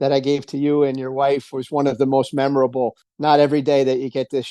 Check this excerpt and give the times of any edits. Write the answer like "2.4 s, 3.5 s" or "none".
3.0 s